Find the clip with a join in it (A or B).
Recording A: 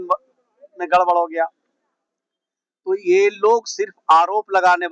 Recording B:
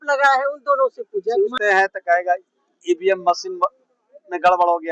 B